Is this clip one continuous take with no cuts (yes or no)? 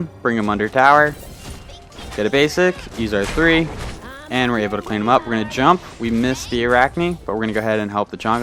yes